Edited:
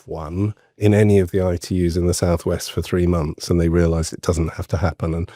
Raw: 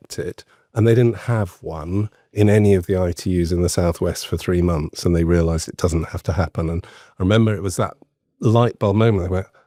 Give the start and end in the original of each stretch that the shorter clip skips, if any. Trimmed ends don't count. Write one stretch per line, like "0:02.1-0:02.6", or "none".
none